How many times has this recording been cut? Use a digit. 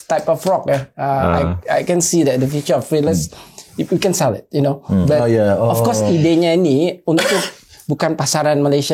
0